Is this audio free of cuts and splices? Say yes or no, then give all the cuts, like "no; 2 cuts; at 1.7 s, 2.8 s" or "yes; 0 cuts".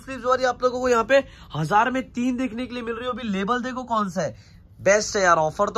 yes; 0 cuts